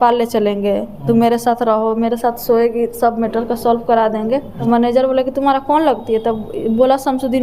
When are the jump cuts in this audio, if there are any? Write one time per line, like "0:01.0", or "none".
0:04.5